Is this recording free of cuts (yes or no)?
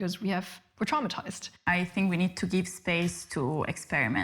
no